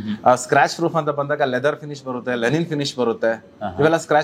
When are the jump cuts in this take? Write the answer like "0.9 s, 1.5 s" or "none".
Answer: none